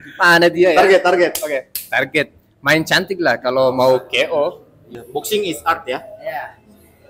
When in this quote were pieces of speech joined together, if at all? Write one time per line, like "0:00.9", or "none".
0:05.0